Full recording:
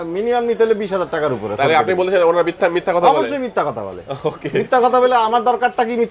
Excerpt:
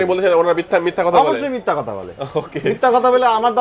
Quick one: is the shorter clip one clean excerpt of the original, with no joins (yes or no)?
yes